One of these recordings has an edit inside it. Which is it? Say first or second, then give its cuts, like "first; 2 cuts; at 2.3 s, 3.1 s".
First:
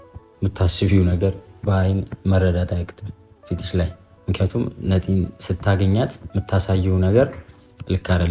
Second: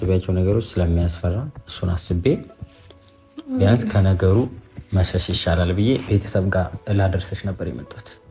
second; 1 cut; at 6.0 s